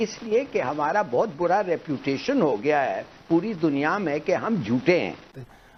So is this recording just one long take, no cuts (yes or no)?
yes